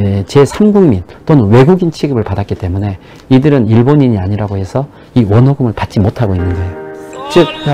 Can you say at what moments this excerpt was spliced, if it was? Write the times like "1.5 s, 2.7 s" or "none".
none